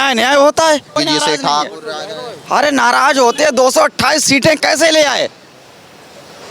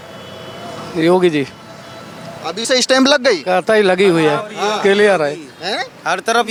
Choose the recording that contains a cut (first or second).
first